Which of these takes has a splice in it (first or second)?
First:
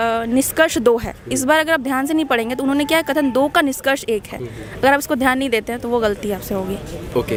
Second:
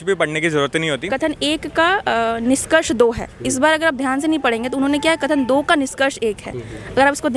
second